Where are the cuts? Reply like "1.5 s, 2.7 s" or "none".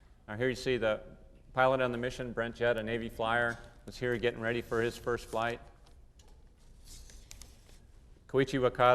1.0 s